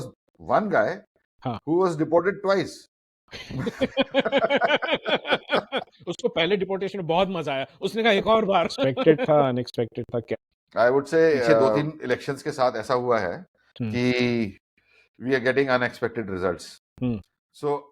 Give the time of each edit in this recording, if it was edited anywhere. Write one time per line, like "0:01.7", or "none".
0:09.2
0:11.7